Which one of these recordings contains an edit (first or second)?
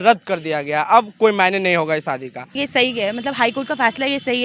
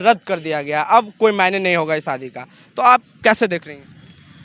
first